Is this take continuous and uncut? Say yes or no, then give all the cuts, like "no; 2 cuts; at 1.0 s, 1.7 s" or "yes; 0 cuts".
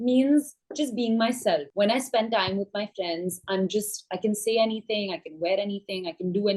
no; 1 cut; at 1.7 s